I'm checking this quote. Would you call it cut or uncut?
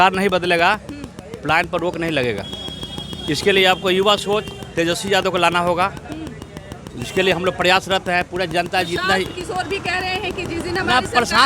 uncut